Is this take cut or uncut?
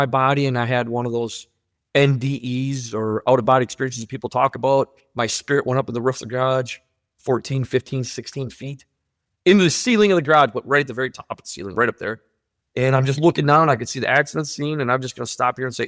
uncut